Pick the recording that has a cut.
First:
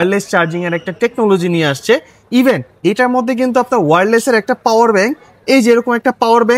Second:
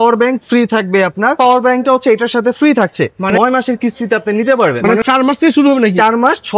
second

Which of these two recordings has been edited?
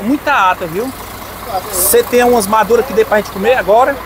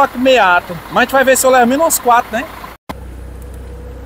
second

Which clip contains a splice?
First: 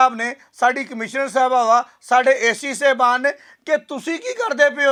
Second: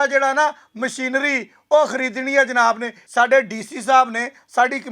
second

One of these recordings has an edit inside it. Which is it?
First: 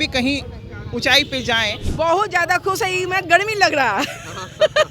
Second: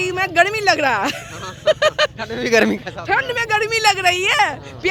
first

